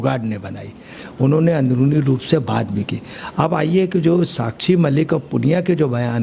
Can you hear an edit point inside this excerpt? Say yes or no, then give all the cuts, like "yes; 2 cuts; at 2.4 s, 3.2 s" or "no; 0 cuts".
yes; 1 cut; at 1.0 s